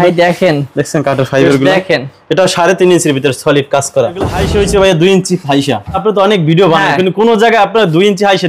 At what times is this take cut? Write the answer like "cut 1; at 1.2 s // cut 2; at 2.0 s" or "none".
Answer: cut 1; at 4.4 s // cut 2; at 6.0 s